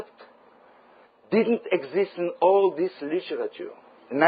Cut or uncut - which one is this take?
cut